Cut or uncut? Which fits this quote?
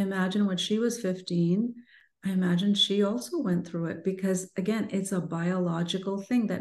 uncut